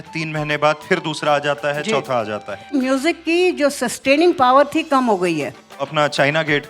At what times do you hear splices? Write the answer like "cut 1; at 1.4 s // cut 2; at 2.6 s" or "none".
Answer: cut 1; at 2.7 s // cut 2; at 5.9 s